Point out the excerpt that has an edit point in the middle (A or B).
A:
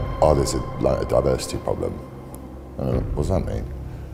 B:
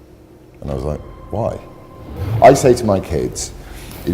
B